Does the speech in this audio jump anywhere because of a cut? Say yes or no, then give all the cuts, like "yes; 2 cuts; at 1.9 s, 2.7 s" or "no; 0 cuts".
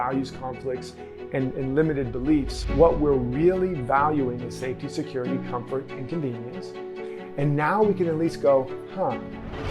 yes; 1 cut; at 2.6 s